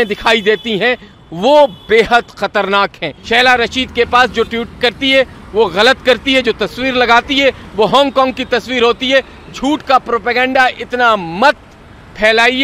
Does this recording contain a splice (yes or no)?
yes